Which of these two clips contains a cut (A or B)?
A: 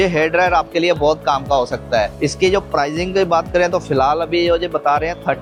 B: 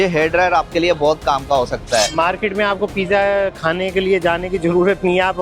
B